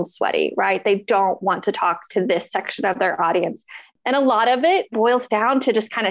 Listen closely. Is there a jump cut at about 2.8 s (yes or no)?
no